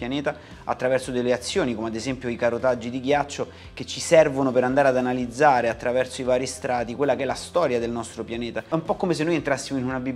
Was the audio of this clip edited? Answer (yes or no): yes